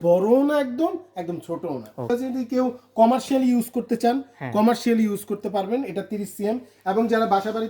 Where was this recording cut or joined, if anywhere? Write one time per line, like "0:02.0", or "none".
0:02.1